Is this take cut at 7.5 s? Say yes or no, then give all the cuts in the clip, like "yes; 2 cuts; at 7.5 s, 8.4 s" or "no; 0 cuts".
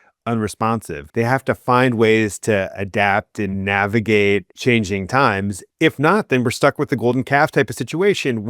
no; 4 cuts; at 1.0 s, 3.6 s, 4.5 s, 5.6 s